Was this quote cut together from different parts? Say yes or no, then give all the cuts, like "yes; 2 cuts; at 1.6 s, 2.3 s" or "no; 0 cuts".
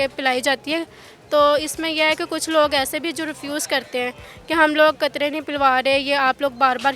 no; 0 cuts